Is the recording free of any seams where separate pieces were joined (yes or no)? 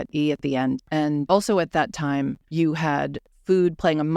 no